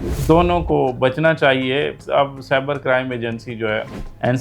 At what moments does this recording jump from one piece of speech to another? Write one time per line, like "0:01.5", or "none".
0:02.0